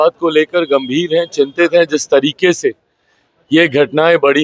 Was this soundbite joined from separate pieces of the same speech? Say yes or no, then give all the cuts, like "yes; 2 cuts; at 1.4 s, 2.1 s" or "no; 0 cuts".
no; 0 cuts